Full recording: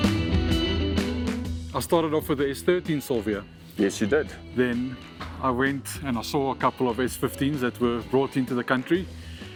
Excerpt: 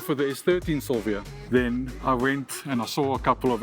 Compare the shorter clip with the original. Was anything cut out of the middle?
yes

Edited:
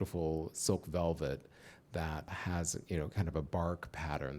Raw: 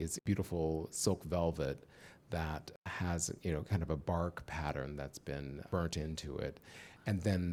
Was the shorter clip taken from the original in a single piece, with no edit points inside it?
no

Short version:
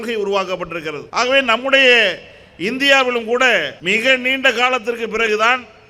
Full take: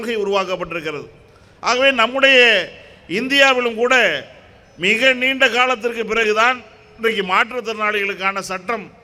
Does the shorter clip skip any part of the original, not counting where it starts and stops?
yes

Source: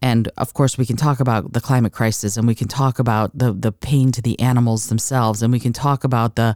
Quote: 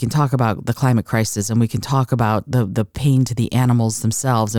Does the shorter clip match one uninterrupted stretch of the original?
yes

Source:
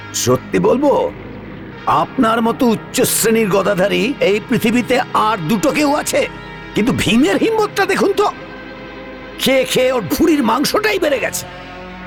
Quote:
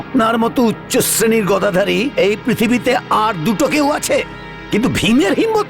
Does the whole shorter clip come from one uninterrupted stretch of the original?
yes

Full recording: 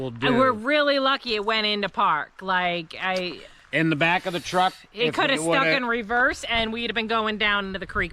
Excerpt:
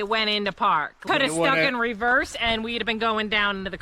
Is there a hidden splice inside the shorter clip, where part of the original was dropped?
yes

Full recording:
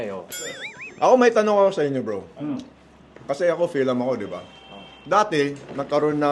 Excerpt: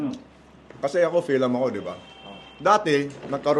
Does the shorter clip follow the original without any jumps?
yes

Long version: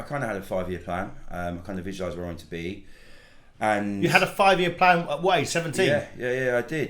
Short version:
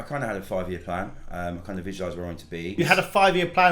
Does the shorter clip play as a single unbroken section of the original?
no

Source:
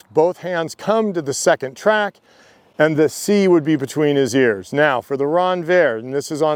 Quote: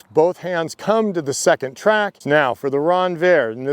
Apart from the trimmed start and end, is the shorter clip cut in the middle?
yes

